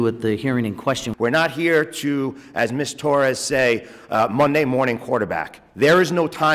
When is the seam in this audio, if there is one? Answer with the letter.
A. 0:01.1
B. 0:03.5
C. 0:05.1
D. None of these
A